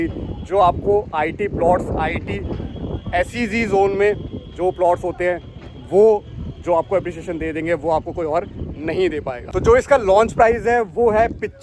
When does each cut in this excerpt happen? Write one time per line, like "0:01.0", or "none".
0:09.5